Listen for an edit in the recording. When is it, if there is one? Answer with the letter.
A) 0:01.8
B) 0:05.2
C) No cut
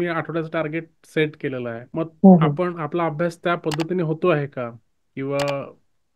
A